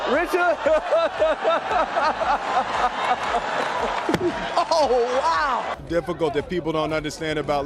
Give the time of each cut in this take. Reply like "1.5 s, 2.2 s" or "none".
5.8 s